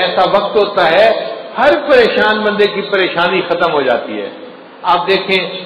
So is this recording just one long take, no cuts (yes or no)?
yes